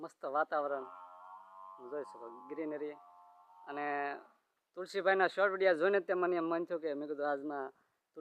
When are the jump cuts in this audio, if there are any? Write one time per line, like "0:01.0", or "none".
none

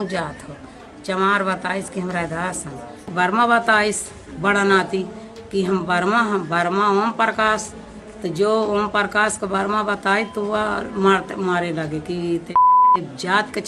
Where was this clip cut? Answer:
0:03.1

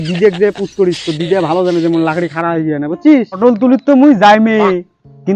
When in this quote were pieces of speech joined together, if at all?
0:03.4

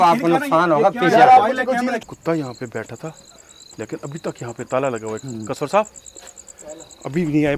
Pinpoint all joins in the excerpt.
0:01.9

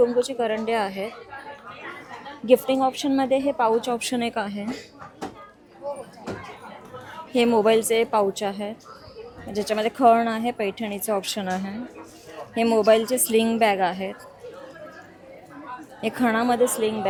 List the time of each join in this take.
none

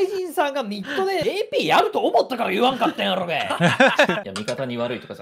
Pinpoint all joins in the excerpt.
0:01.2
0:04.3

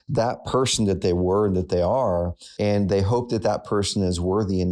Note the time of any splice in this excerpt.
0:02.4

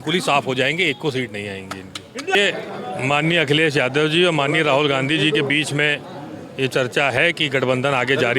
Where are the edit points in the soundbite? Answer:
0:02.4

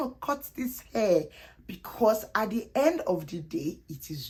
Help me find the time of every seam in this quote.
none

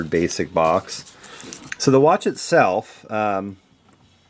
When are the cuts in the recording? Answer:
none

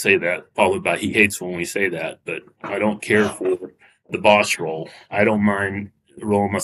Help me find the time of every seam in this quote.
0:02.6

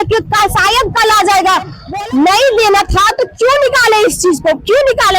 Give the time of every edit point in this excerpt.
0:01.8

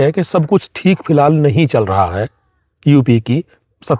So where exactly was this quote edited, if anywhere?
none

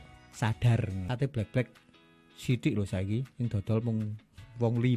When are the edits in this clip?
0:01.0

